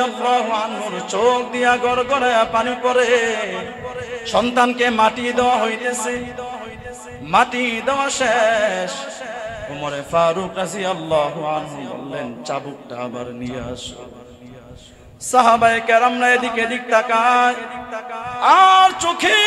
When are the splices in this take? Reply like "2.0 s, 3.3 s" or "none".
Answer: 4.1 s